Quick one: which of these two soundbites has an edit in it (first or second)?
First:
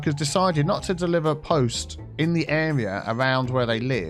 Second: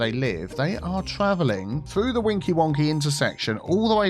second